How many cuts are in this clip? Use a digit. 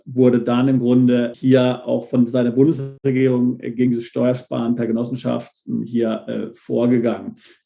2